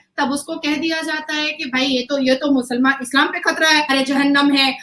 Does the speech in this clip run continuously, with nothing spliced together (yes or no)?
no